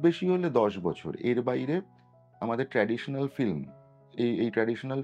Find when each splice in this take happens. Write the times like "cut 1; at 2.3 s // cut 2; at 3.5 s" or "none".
none